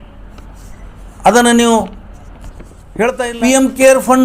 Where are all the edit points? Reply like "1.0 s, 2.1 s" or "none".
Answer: 3.0 s